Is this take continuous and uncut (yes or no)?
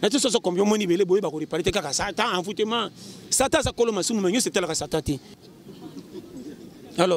no